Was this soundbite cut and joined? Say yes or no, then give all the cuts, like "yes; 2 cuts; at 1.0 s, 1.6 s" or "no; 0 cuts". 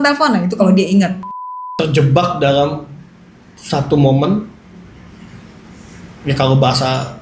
yes; 1 cut; at 1.7 s